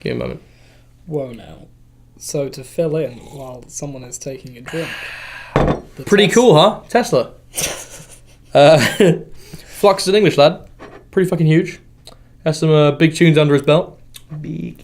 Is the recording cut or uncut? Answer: cut